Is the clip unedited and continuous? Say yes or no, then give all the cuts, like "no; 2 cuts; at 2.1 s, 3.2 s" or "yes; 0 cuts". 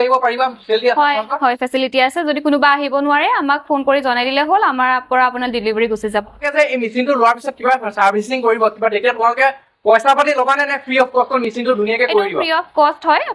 yes; 0 cuts